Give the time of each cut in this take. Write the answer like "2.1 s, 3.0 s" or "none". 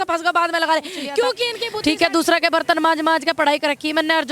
1.6 s